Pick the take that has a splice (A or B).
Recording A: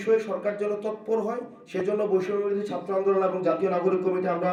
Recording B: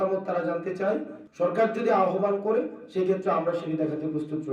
B